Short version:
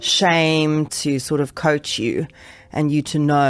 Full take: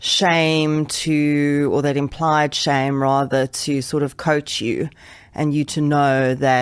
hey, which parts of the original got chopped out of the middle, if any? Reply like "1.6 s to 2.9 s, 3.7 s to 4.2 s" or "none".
0.9 s to 3.6 s